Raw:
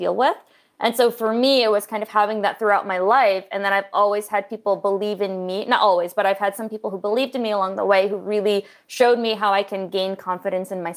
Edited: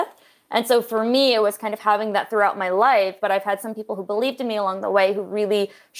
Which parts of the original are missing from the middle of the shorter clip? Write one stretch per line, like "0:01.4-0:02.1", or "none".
0:03.4-0:06.1